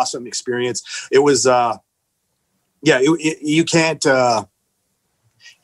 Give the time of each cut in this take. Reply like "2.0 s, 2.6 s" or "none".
none